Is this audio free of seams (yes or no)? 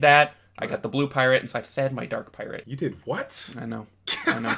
no